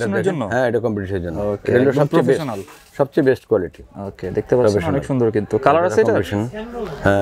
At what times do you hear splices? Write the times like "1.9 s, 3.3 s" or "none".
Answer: none